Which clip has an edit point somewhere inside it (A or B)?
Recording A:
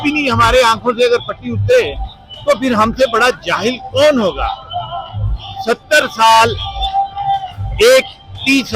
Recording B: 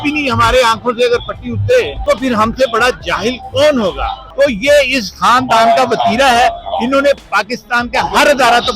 B